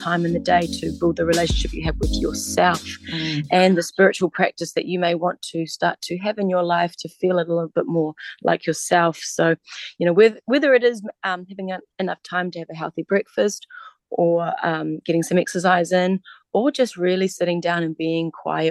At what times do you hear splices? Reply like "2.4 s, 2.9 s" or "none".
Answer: none